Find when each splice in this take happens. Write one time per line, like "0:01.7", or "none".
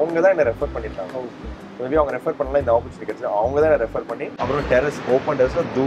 0:04.2